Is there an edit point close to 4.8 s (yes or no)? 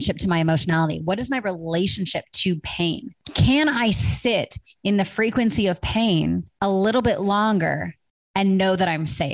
no